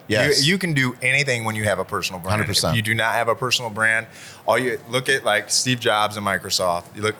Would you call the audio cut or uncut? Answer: uncut